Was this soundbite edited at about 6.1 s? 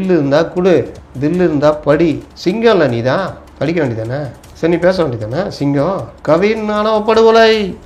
yes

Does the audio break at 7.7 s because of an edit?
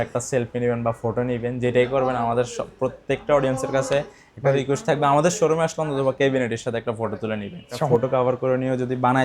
yes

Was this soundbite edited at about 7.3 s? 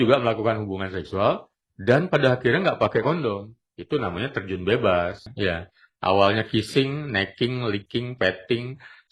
no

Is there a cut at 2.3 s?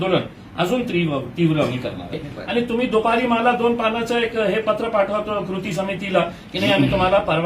yes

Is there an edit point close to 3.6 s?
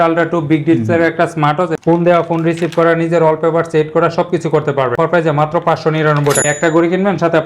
no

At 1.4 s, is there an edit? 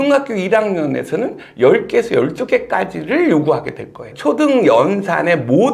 no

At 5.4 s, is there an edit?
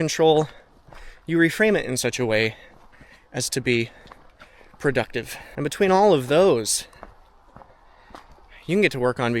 yes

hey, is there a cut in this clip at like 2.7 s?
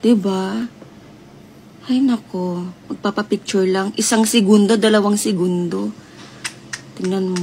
yes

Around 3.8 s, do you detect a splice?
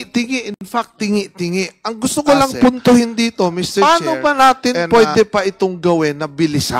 yes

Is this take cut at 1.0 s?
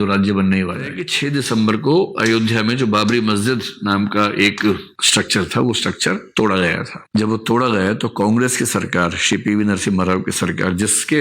yes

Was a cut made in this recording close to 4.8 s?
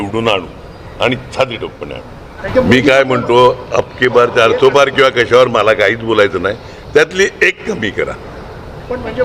no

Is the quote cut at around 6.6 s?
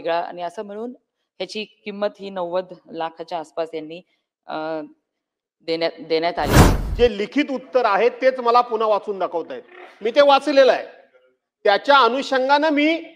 yes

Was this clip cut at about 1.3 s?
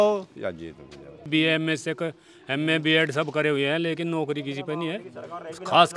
yes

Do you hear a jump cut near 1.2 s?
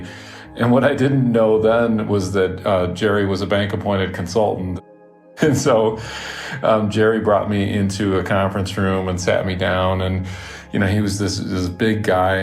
no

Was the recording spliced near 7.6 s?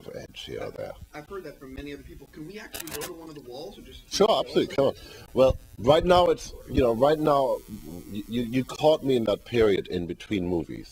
no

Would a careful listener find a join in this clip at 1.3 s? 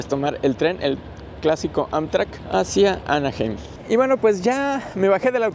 no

